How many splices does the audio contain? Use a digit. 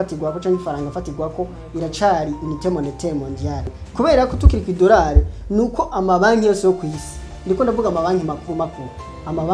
2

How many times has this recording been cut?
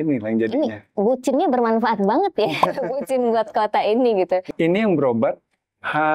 1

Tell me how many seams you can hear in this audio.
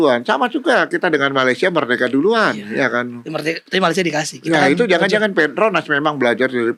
0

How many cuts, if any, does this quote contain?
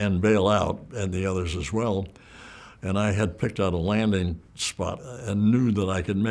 2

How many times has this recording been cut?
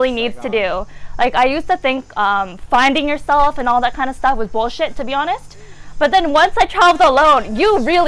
0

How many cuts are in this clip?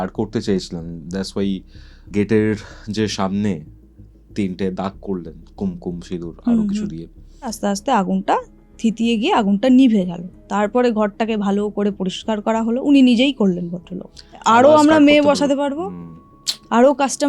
2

